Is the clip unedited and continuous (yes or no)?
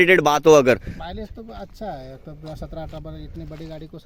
yes